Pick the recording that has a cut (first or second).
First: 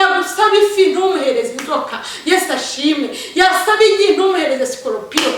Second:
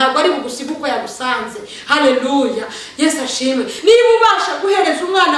second